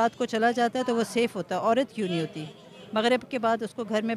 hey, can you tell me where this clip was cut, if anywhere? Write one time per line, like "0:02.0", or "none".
none